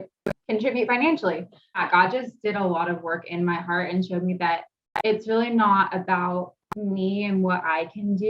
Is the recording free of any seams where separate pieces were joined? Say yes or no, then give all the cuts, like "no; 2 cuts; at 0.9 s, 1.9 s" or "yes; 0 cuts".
no; 1 cut; at 1.8 s